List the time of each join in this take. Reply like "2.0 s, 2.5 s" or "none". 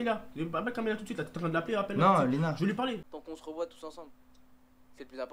3.1 s

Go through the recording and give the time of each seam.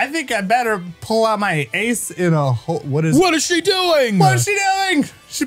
3.1 s

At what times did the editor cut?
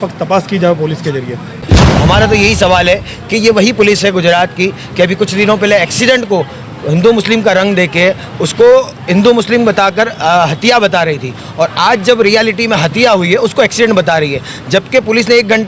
1.6 s

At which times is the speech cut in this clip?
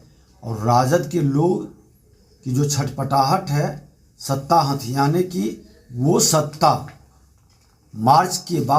none

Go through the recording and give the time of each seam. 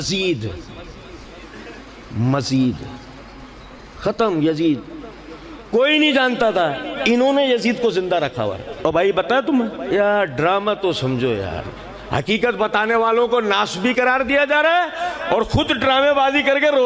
9.8 s

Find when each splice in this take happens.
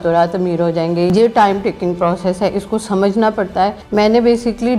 1.1 s, 3.8 s

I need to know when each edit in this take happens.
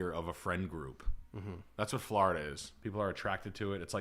2.7 s

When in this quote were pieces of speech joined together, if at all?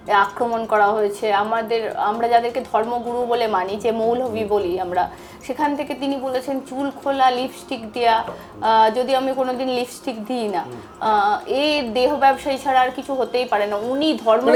none

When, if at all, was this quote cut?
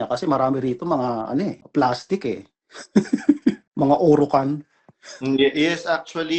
none

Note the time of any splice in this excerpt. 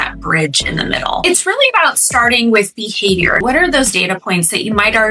1.2 s, 3.4 s

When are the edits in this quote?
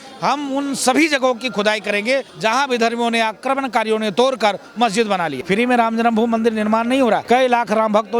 2.3 s, 5.3 s, 7.2 s

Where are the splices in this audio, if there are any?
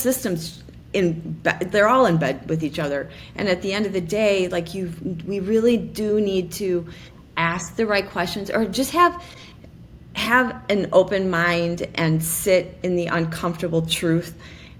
none

